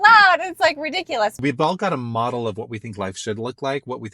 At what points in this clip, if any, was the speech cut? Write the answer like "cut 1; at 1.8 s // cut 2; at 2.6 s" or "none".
cut 1; at 1.4 s